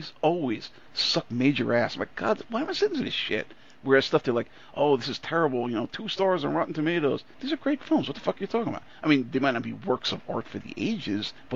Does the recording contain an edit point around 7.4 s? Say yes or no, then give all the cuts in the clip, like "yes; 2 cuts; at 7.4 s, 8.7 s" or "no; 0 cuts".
yes; 1 cut; at 7.4 s